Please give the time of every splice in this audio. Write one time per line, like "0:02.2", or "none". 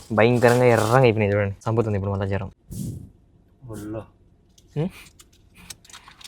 0:01.6
0:02.6

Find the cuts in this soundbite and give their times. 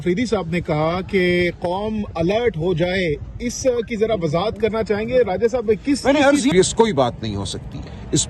0:06.5

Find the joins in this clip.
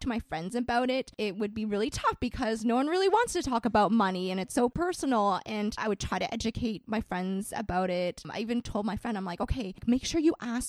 0:01.1
0:04.7
0:05.8
0:08.3
0:09.8

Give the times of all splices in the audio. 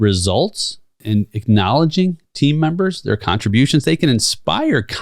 0:01.0

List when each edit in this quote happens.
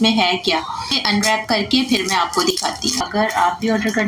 0:01.0
0:03.0

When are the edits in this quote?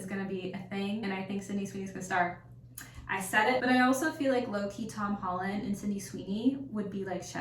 0:03.6

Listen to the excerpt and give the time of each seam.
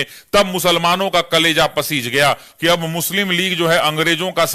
0:02.5

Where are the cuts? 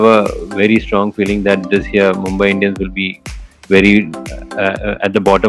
none

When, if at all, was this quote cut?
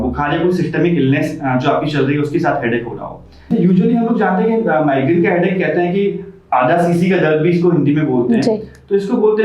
0:03.3

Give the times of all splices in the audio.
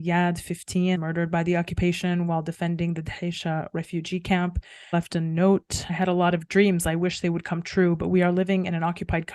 0:01.0
0:04.9
0:05.8

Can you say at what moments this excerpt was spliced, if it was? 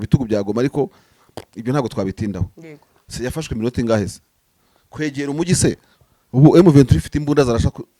none

